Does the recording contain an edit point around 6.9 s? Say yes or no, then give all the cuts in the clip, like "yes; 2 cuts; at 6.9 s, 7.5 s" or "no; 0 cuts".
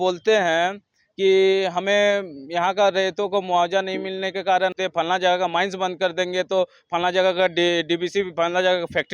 no; 1 cut; at 4.7 s